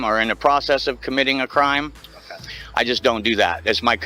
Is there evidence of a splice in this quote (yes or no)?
no